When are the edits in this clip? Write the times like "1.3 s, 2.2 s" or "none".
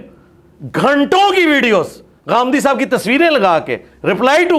none